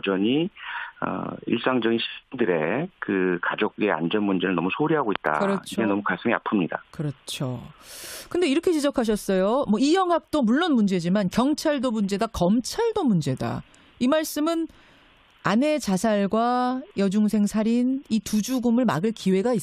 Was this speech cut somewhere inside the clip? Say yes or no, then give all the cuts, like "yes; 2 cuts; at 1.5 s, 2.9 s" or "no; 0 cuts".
no; 0 cuts